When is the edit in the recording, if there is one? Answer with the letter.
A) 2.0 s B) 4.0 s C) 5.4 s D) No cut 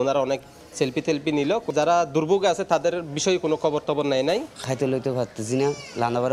D